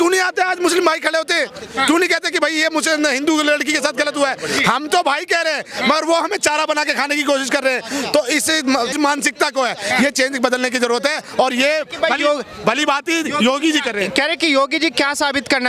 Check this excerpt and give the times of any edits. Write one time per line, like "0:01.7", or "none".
none

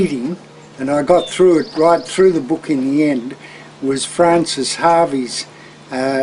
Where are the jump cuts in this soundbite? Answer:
0:04.7

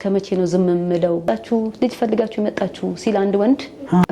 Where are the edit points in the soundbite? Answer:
0:01.2

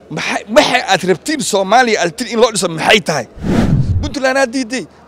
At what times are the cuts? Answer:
0:03.8

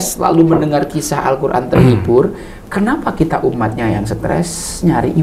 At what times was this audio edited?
none

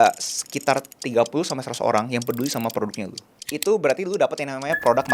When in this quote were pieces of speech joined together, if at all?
0:03.4

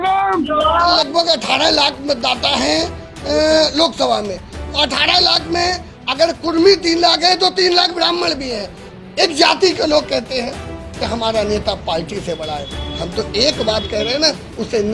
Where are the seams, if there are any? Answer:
0:01.0
0:08.9

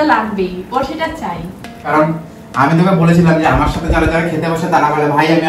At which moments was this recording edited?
0:01.9

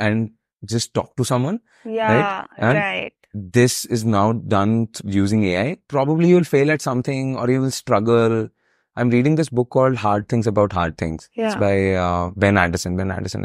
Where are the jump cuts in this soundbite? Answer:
0:05.8

